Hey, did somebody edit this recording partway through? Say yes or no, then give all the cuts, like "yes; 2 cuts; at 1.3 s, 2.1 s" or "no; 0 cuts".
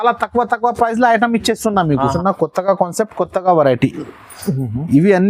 yes; 1 cut; at 2.2 s